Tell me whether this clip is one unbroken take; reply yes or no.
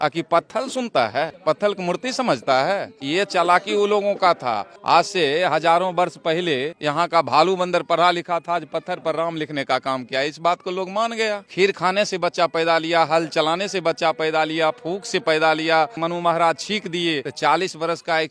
no